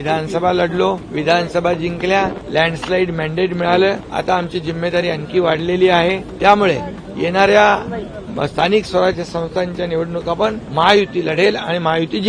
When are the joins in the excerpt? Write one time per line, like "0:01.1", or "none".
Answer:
0:01.1
0:02.4
0:04.0
0:06.3
0:10.6